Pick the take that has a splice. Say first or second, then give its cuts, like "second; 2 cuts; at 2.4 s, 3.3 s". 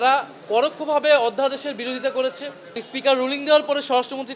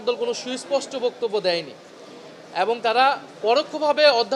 first; 1 cut; at 2.8 s